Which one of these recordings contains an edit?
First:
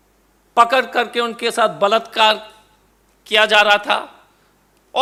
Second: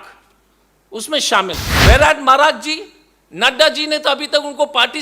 second; 1 cut; at 1.7 s

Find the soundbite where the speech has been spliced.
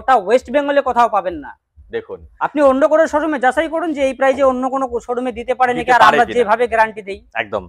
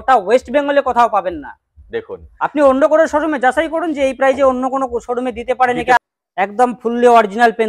second; 1 cut; at 6.0 s

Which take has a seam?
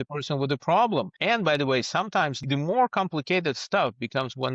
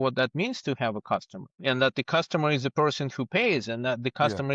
first; 2 cuts; at 1.1 s, 2.4 s

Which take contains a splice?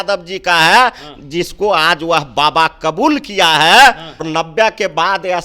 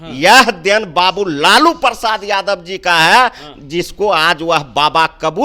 first; 1 cut; at 4.3 s

